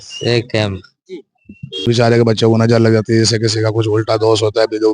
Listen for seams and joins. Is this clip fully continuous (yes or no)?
no